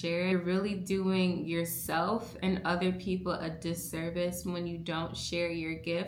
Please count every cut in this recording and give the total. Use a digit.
0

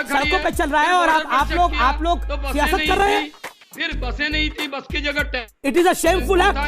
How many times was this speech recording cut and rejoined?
0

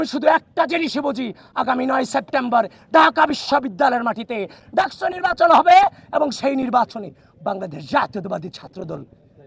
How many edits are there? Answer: 0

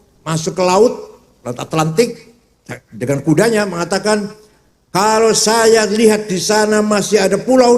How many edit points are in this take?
0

